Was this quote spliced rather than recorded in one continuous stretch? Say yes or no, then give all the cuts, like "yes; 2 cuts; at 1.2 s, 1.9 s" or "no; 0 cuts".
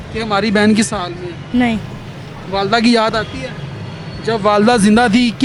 no; 0 cuts